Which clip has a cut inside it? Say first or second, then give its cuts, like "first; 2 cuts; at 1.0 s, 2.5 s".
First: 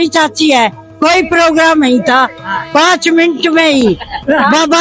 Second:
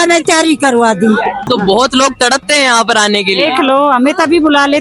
second; 1 cut; at 1.5 s